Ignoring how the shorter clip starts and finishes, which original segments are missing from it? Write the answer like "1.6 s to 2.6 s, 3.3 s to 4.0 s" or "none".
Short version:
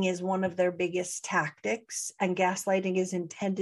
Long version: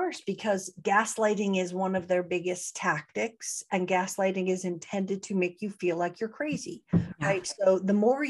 none